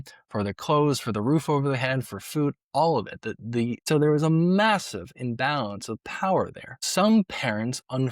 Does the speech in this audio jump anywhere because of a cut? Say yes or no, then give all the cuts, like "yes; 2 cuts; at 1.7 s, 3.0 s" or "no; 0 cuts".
yes; 2 cuts; at 3.9 s, 6.8 s